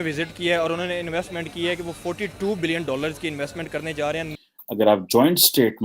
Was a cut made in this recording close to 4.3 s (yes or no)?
yes